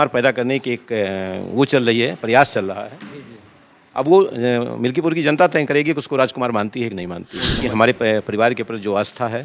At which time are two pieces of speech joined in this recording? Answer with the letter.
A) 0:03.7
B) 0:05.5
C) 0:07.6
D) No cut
C